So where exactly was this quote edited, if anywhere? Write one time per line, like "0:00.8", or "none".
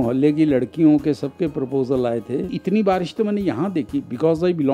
0:02.5